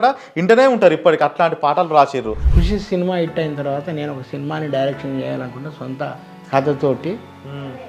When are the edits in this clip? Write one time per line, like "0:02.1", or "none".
0:02.4